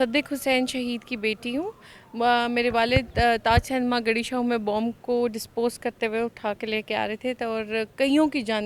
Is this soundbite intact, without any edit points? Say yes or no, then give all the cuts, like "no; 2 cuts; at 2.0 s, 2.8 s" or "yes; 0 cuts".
yes; 0 cuts